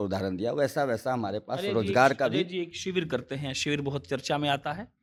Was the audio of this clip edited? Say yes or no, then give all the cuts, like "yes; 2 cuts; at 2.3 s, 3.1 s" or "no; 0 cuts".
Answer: no; 0 cuts